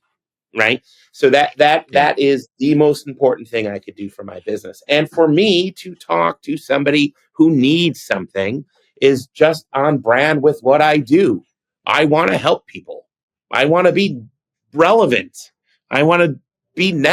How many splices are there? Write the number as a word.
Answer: zero